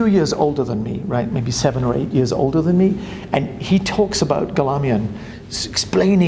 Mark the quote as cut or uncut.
uncut